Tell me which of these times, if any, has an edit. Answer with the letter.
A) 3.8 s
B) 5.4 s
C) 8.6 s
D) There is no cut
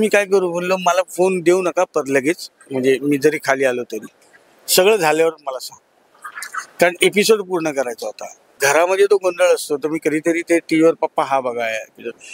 C